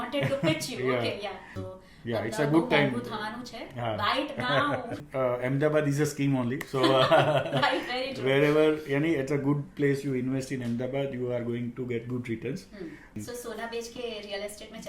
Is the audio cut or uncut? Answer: cut